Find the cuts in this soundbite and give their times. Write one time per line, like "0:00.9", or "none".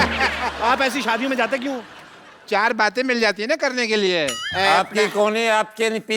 0:04.4